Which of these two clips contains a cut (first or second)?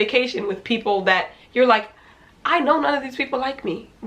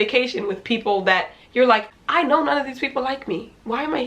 second